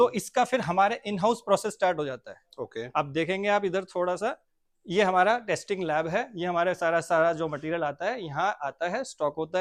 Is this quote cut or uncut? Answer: uncut